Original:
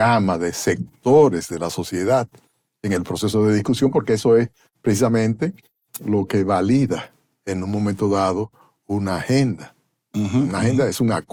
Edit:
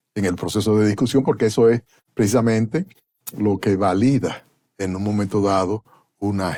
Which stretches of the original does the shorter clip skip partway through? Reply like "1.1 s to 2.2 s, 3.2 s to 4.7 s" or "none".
none